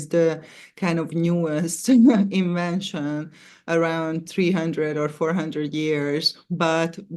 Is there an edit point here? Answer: no; 0 cuts

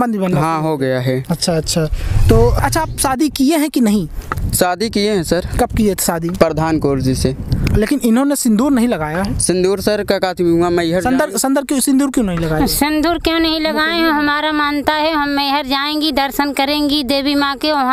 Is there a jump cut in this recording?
yes; 1 cut; at 2.6 s

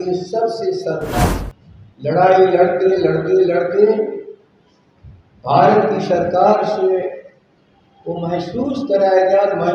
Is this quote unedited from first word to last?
no; 1 cut; at 1.2 s

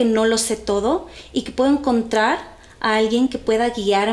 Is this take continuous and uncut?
yes; 0 cuts

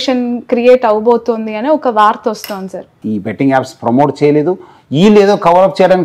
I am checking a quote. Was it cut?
yes; 1 cut; at 3.0 s

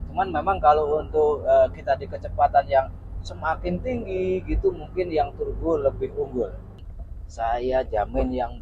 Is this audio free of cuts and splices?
no; 1 cut; at 6.8 s

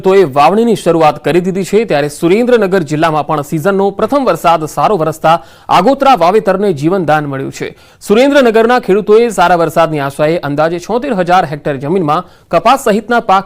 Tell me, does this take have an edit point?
no; 0 cuts

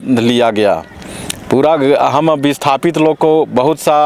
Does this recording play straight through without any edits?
yes; 0 cuts

